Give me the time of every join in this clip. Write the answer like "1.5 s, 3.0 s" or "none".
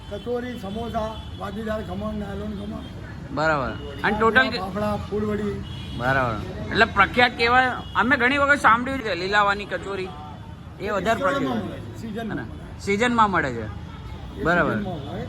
9.0 s